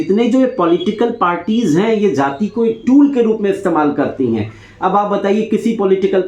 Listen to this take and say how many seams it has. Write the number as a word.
zero